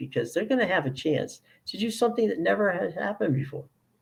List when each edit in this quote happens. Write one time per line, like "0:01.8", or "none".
none